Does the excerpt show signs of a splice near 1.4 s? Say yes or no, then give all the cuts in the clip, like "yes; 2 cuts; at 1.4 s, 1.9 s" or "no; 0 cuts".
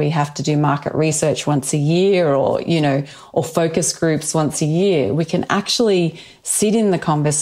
no; 0 cuts